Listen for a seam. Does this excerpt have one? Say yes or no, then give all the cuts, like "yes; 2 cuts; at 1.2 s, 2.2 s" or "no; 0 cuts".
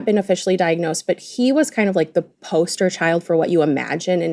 no; 0 cuts